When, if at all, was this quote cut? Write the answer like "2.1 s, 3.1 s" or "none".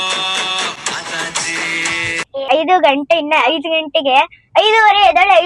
2.5 s